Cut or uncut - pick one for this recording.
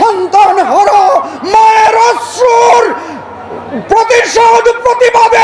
uncut